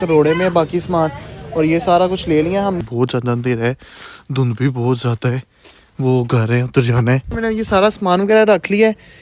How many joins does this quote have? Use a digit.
2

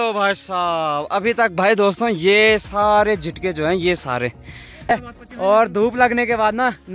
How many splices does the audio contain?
1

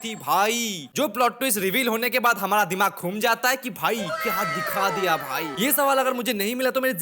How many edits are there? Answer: 2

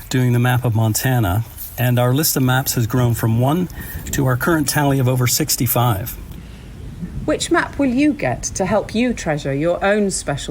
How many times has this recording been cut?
1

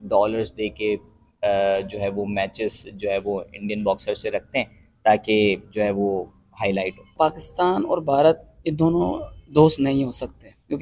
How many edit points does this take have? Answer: 1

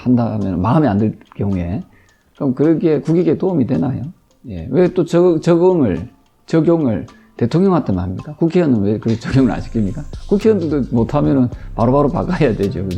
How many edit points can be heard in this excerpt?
0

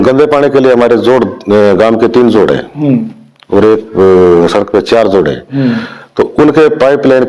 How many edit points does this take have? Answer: 0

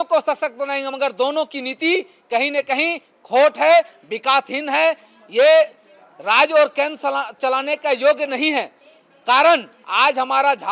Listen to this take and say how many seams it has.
0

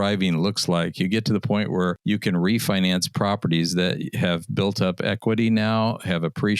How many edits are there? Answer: 1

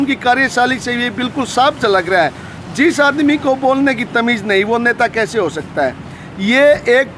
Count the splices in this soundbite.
0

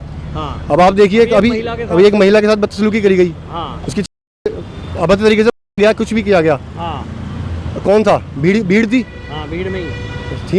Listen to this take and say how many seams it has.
0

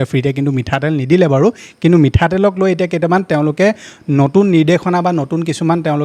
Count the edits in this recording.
0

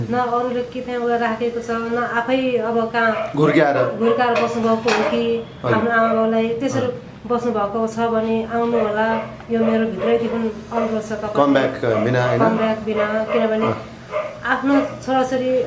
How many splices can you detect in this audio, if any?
0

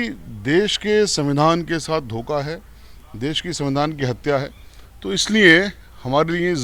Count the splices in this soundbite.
0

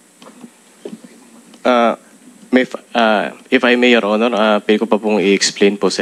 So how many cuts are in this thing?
0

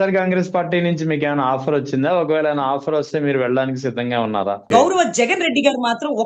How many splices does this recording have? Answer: 1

